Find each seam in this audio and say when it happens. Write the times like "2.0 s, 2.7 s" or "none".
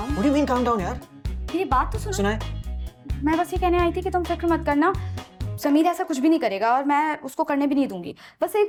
none